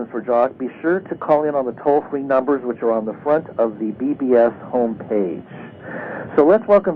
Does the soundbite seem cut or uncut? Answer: uncut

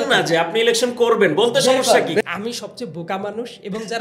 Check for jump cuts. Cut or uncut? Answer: cut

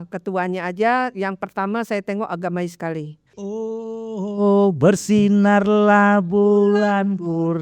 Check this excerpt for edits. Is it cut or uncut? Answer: cut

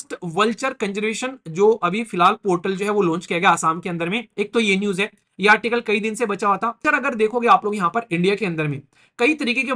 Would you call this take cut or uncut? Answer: cut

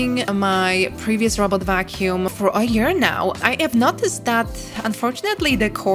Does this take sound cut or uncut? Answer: uncut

